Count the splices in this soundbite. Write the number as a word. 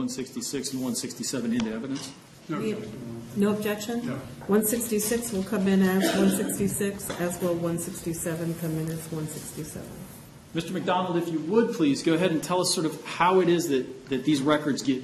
one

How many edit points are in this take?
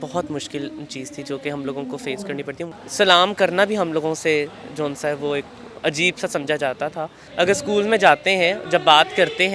two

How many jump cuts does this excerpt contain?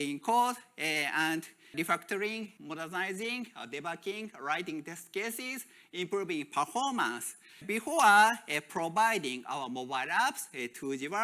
three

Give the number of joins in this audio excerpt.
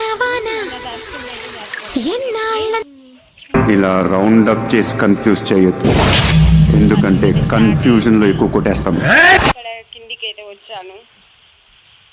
one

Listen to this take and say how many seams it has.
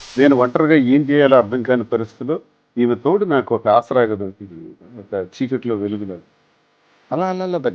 zero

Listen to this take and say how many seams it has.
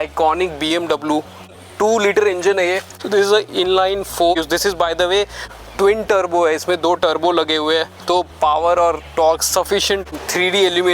two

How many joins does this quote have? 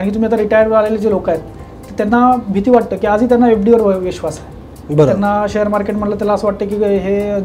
zero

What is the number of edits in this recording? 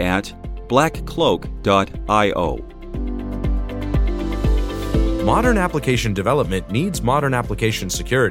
two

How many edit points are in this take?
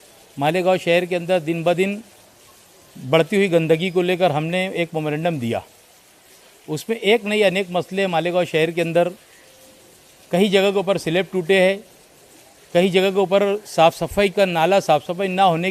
zero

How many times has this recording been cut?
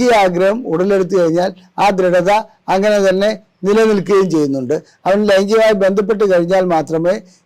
zero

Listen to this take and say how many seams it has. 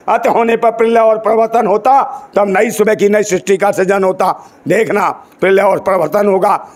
zero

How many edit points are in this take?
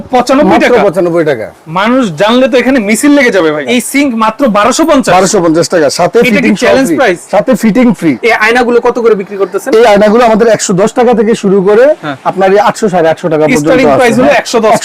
two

